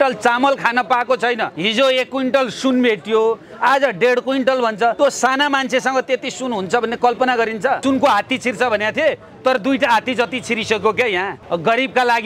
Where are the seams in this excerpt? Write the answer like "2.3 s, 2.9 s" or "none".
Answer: 1.5 s, 5.0 s, 7.8 s, 11.4 s